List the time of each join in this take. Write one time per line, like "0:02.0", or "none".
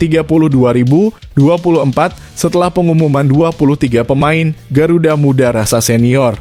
none